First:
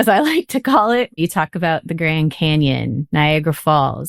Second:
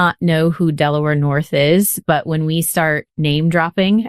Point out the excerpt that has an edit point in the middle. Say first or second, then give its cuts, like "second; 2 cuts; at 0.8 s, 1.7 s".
first; 1 cut; at 1.2 s